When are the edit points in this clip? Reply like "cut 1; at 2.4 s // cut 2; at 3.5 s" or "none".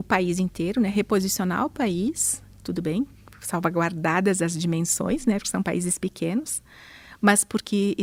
none